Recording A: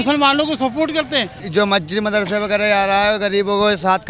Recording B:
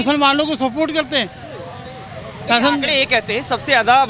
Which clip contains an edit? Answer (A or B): A